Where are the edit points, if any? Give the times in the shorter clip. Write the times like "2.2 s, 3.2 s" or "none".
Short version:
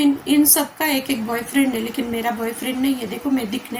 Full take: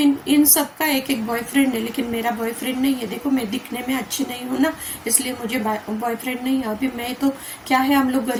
none